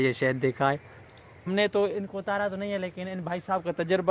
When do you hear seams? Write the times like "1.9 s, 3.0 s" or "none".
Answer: 1.4 s